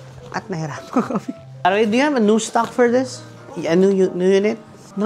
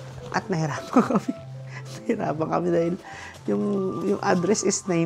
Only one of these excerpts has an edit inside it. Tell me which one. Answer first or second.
first